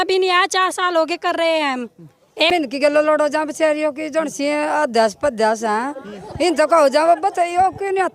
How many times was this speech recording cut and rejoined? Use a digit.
1